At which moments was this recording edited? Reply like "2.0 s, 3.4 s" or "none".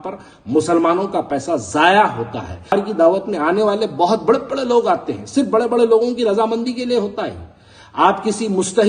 2.7 s